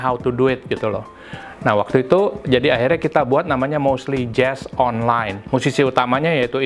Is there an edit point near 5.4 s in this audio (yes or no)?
yes